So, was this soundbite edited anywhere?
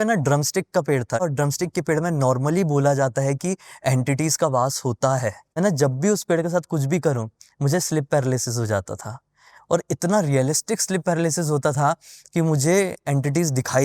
yes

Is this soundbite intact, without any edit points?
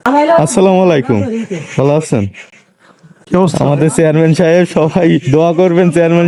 yes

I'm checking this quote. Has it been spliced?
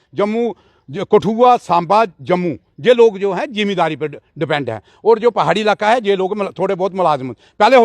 no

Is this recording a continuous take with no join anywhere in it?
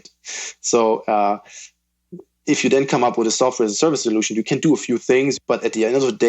no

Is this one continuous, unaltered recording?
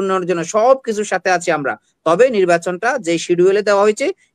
yes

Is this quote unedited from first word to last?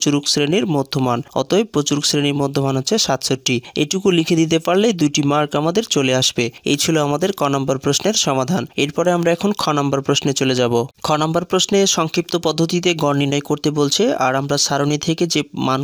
yes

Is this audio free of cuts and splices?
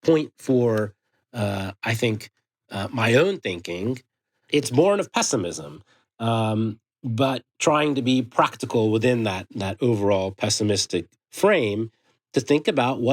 no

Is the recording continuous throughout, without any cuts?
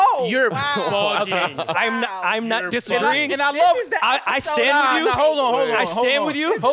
yes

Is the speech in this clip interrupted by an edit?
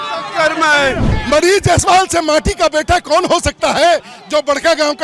yes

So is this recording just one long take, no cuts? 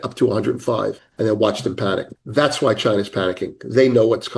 no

